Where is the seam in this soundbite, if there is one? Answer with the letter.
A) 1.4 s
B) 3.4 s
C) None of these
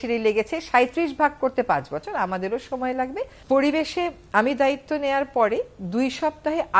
B